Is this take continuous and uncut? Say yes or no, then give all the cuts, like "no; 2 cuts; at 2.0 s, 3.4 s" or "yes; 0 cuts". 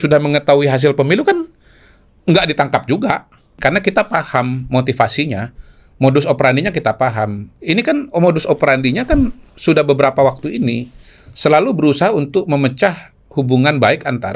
no; 1 cut; at 3.5 s